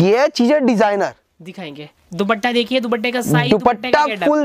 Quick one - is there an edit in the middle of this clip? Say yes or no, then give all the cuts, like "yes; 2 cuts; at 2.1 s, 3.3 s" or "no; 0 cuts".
no; 0 cuts